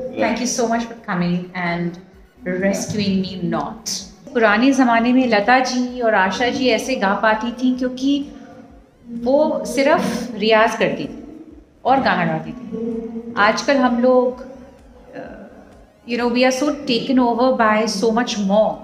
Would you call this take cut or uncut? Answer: cut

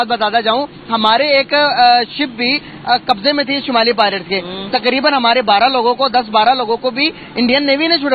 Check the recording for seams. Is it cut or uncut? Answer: uncut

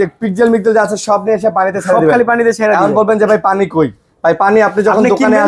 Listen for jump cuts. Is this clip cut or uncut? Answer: uncut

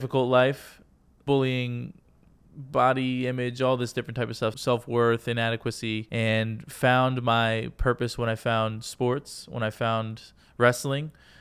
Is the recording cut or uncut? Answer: cut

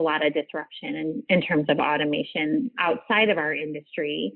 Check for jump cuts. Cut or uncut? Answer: cut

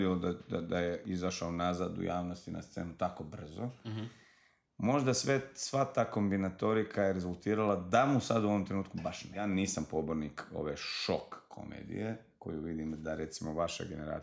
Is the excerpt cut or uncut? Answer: cut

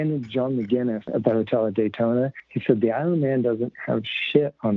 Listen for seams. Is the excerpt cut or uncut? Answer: cut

